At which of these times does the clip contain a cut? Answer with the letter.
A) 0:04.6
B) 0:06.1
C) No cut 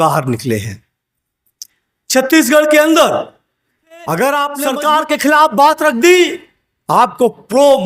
A